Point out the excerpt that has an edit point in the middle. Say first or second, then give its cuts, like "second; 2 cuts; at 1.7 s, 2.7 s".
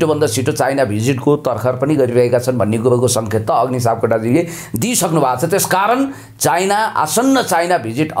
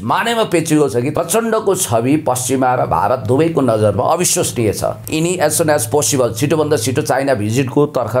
second; 2 cuts; at 1.1 s, 5.0 s